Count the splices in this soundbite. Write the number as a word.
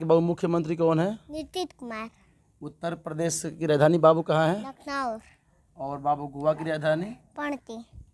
zero